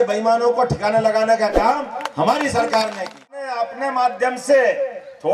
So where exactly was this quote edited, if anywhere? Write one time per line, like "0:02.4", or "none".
0:03.5